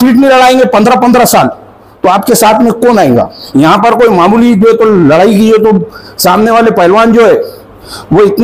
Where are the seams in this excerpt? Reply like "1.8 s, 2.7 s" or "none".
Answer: 3.4 s